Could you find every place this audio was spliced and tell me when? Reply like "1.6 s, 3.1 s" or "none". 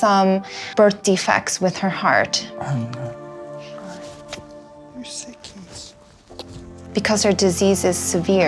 none